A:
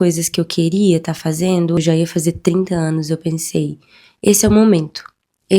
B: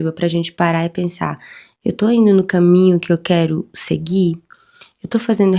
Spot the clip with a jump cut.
A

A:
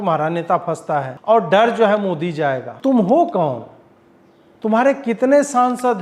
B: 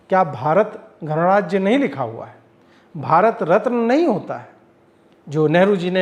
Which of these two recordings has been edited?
A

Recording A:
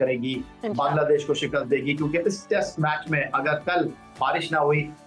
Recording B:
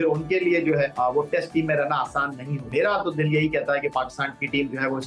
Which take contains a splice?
B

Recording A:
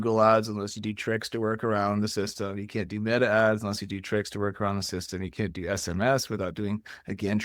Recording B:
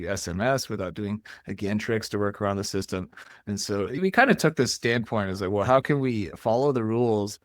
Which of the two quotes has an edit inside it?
B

